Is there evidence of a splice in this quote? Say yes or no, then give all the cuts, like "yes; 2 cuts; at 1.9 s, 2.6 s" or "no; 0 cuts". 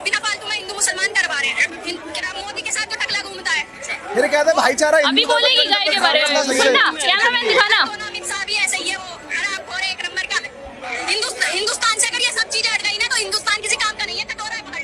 no; 0 cuts